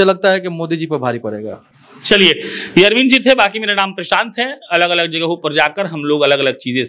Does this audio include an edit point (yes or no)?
no